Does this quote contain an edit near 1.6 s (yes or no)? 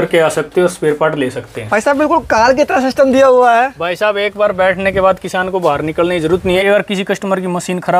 yes